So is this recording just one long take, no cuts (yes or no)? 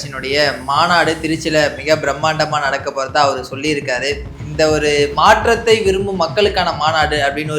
yes